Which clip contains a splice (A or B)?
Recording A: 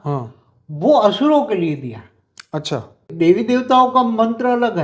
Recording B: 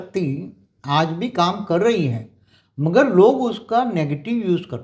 A